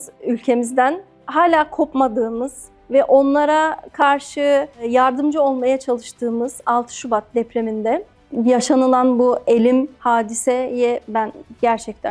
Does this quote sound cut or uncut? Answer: uncut